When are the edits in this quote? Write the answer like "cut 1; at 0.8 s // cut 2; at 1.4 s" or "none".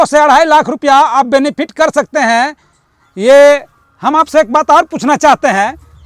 none